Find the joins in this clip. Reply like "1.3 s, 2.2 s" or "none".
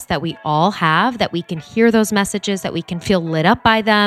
3.0 s